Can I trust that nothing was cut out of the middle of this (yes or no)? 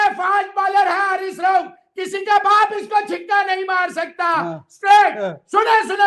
yes